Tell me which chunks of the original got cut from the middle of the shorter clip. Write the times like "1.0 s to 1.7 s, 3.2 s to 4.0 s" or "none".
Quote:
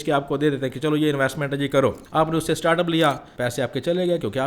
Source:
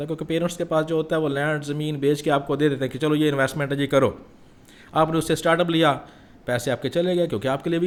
4.2 s to 4.8 s, 6.1 s to 6.4 s